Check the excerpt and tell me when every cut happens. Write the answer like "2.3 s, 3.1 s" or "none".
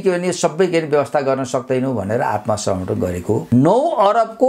3.4 s